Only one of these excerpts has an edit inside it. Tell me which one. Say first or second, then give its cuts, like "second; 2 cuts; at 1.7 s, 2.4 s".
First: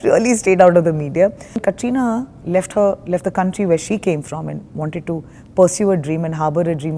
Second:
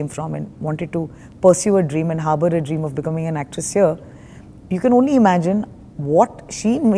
first; 1 cut; at 1.6 s